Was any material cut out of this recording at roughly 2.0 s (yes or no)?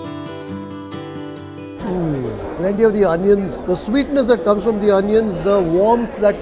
no